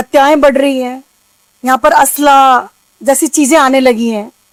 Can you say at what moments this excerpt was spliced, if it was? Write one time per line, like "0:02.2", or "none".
none